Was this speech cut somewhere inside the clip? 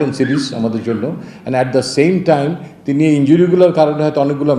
no; 0 cuts

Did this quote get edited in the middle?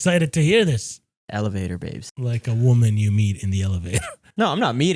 yes; 2 cuts; at 1.1 s, 2.0 s

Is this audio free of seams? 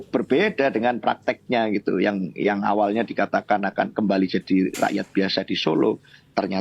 yes; 0 cuts

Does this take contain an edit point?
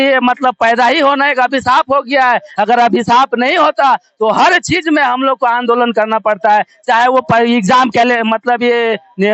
no; 0 cuts

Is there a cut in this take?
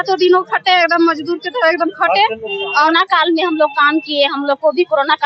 yes; 1 cut; at 2.8 s

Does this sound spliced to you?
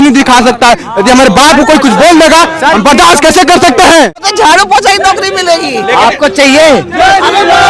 yes; 1 cut; at 4.2 s

